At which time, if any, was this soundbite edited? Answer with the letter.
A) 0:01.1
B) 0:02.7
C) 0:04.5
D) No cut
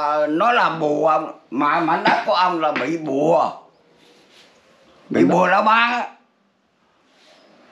D